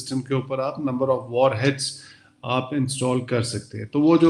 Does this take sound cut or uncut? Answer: uncut